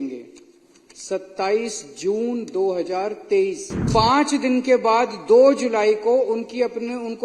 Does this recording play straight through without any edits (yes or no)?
no